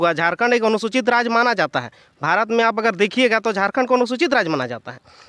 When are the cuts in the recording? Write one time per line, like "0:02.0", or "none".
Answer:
none

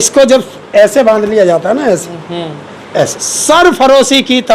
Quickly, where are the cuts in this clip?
0:03.3

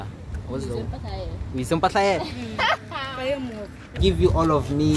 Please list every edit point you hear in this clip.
0:04.0

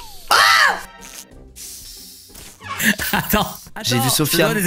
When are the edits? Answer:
none

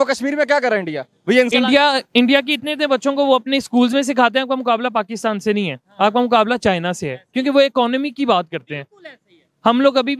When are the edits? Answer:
0:01.5

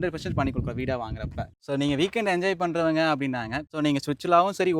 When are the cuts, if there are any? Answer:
0:01.4
0:03.6

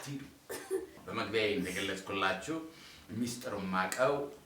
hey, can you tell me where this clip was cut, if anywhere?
0:00.9

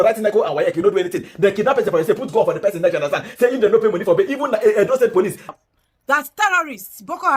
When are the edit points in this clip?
0:05.4

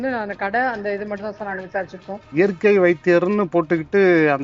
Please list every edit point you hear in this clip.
0:02.3

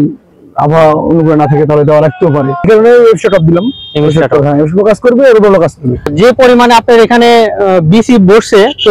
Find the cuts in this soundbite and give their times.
0:02.6
0:06.1

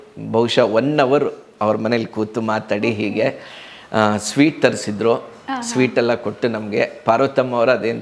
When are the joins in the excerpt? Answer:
none

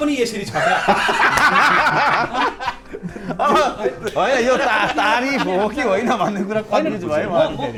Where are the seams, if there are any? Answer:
none

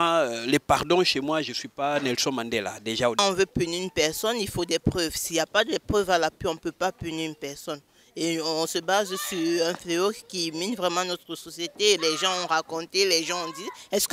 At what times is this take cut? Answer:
0:03.2

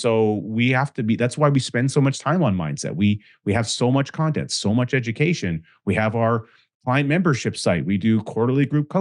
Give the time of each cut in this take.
none

